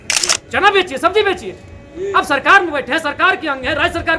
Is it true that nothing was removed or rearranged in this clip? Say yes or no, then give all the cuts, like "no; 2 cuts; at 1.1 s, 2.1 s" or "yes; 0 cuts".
yes; 0 cuts